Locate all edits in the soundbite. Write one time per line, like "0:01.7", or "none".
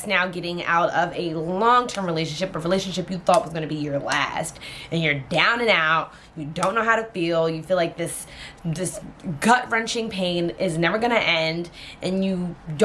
none

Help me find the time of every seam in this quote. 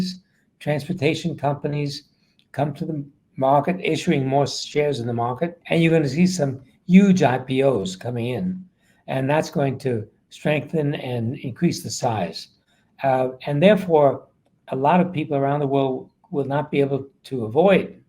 0:05.6

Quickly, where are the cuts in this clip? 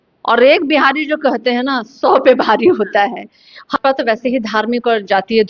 0:03.7

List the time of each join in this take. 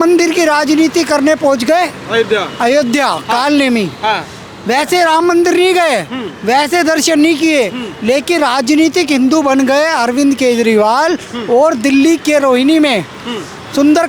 none

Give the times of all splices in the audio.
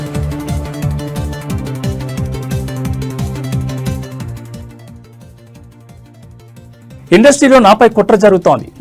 0:07.0

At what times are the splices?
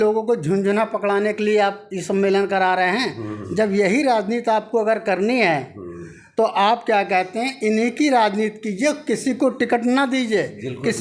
none

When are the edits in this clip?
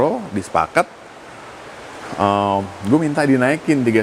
none

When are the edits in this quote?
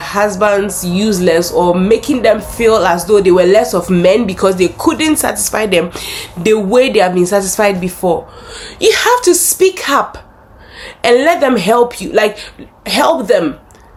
none

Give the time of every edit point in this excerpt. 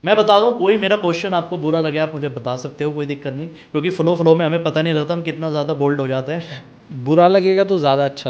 none

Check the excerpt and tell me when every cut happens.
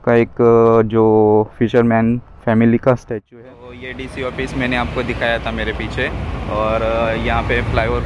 0:03.2

